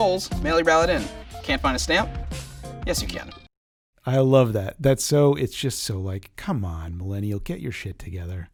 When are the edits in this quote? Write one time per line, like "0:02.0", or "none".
none